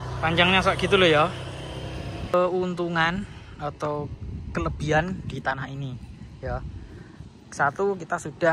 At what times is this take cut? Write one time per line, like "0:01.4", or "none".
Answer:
0:02.3